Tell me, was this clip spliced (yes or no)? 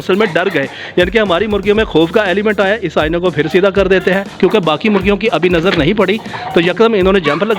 no